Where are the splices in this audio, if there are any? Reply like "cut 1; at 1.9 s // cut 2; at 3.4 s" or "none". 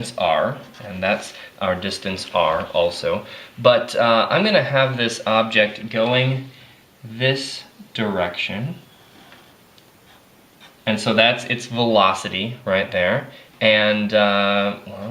cut 1; at 6.6 s